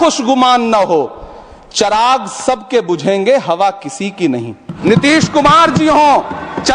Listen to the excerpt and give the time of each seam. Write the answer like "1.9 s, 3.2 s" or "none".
4.8 s